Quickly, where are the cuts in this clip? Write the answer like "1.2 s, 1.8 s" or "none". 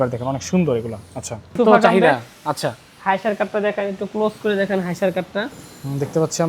1.6 s